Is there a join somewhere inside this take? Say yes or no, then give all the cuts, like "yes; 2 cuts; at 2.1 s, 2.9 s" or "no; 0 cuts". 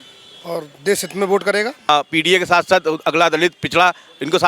yes; 1 cut; at 1.9 s